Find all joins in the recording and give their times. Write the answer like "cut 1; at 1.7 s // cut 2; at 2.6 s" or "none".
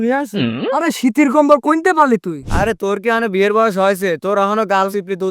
cut 1; at 2.5 s